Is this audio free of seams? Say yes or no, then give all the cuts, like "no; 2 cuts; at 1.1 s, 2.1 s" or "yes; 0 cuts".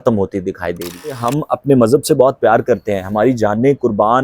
no; 1 cut; at 1.2 s